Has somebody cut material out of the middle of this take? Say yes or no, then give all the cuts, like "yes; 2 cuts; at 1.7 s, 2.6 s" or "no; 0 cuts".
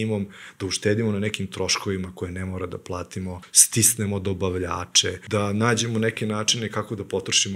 yes; 2 cuts; at 3.5 s, 5.2 s